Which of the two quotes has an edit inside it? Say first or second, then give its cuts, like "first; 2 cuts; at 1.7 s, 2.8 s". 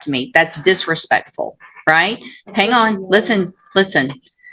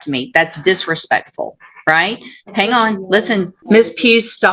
second; 1 cut; at 3.6 s